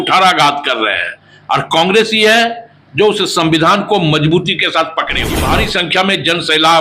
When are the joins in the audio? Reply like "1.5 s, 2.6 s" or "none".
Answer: 5.4 s